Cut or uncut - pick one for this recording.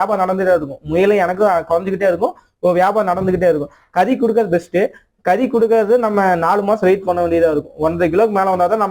uncut